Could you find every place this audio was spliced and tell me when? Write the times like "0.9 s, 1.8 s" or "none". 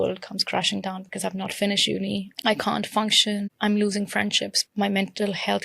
2.3 s, 3.5 s, 4.5 s